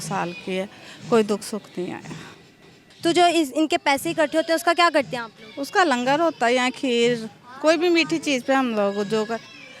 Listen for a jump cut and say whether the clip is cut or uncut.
uncut